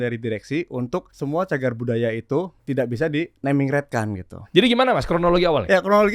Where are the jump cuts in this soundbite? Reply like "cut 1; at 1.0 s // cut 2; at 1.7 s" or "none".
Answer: cut 1; at 1.1 s // cut 2; at 2.6 s // cut 3; at 4.4 s